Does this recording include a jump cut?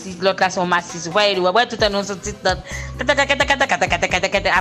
no; 0 cuts

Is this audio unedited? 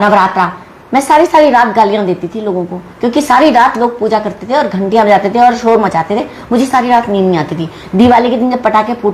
yes; 0 cuts

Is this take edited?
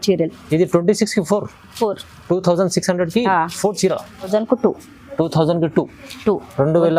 yes; 1 cut; at 4.2 s

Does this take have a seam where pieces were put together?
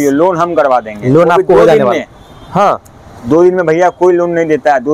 no; 0 cuts

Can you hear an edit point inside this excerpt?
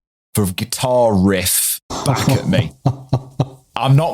yes; 1 cut; at 1.9 s

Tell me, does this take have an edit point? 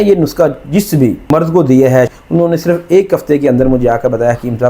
yes; 2 cuts; at 1.2 s, 2.1 s

